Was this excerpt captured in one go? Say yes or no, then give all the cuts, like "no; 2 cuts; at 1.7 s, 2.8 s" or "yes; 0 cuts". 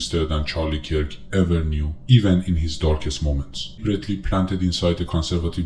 no; 1 cut; at 3.8 s